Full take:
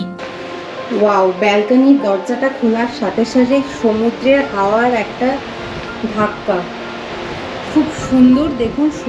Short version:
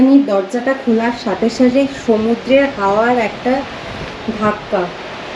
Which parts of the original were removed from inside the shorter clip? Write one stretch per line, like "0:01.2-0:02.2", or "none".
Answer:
none